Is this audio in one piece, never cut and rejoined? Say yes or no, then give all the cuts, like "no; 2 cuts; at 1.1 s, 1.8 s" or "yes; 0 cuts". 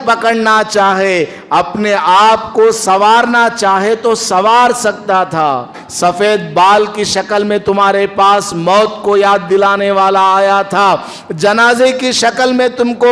no; 1 cut; at 5.8 s